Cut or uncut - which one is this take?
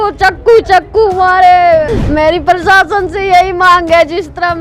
cut